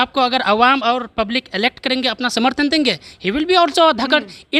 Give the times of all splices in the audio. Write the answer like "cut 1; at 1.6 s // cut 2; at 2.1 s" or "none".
none